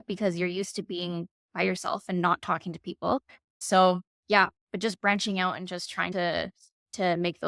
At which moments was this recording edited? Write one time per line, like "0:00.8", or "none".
none